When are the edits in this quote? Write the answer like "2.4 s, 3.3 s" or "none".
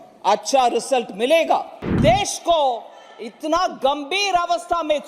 1.8 s